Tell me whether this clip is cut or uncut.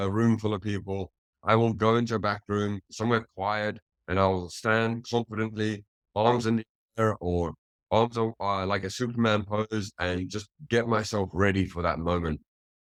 uncut